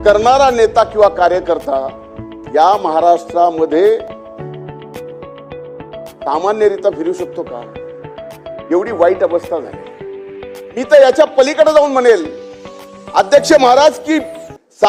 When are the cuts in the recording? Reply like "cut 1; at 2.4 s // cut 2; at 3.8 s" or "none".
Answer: cut 1; at 4.7 s // cut 2; at 6.3 s